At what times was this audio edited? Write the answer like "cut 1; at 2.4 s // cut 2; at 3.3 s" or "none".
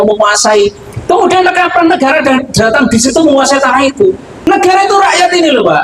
cut 1; at 4.3 s